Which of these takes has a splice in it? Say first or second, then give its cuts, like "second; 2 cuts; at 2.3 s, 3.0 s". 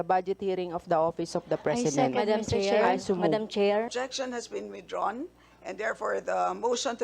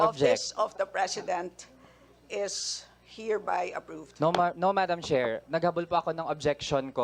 first; 1 cut; at 3.9 s